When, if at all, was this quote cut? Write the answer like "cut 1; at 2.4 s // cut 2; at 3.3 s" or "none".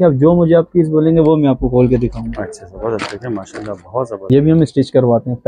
cut 1; at 4.3 s